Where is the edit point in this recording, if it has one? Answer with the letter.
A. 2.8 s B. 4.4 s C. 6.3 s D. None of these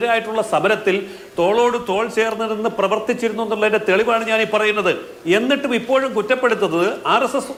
D